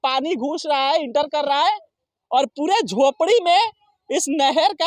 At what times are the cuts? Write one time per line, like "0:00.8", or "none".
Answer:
none